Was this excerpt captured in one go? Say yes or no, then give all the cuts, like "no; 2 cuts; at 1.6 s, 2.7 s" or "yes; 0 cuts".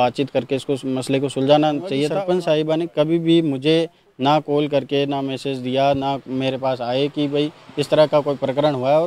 no; 1 cut; at 2.1 s